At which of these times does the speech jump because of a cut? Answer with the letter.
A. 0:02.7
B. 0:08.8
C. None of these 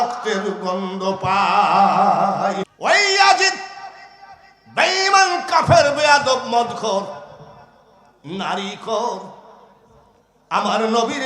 A